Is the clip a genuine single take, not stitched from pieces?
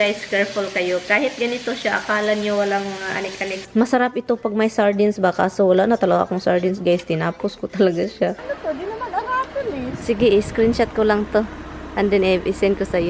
no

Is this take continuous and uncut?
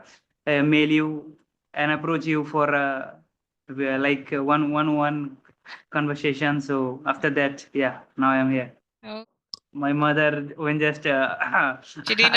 no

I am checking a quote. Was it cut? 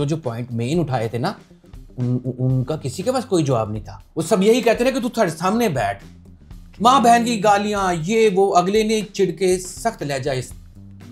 no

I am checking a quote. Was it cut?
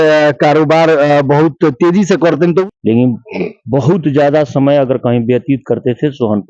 yes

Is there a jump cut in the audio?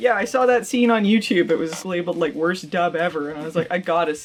no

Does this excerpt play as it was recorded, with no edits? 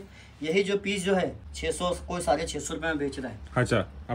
no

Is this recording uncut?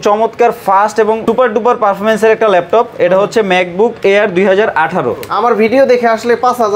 no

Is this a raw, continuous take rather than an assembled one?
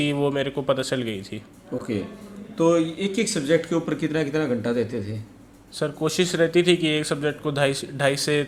yes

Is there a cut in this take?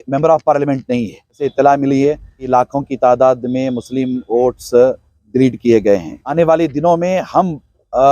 yes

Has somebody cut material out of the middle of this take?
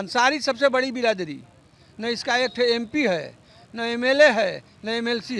no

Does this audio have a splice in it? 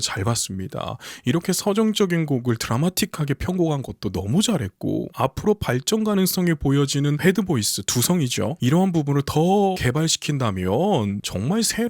no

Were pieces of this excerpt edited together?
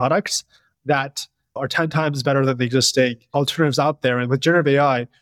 yes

